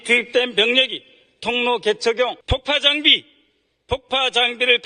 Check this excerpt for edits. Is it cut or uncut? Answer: cut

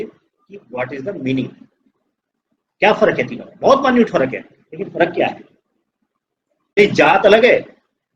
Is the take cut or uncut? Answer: cut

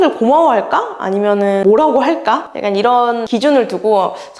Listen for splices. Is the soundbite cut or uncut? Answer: uncut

